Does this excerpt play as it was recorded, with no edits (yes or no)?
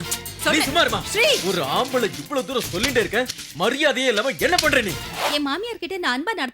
no